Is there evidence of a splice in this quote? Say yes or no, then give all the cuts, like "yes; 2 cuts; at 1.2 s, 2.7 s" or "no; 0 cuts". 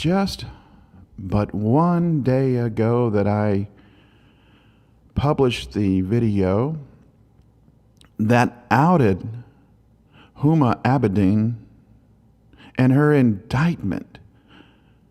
no; 0 cuts